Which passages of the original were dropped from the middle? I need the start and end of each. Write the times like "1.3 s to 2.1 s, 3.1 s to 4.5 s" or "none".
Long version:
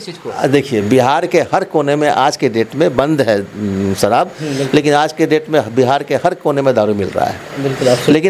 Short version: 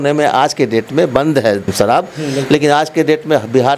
3.5 s to 3.9 s

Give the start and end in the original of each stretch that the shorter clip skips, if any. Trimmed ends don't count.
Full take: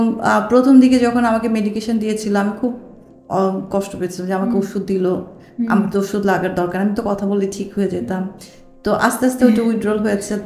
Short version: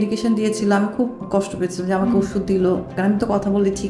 2.9 s to 3.6 s, 5.4 s to 6.7 s

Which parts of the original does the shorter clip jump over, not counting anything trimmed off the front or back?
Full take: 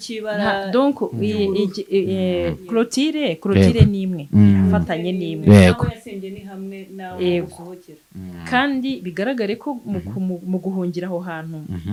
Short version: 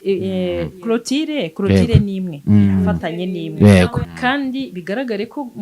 6.0 s to 8.4 s

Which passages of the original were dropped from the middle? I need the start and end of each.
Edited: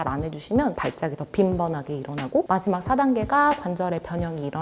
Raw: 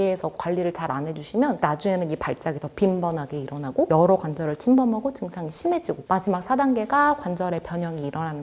1.6 s to 2.2 s, 3.9 s to 6.0 s

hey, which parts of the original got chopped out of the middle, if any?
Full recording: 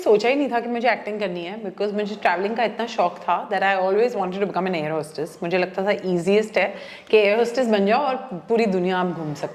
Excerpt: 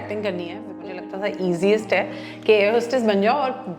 1.9 s to 5.6 s

